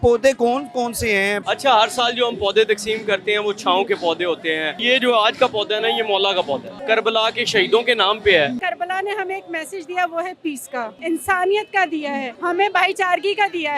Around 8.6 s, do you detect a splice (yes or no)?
yes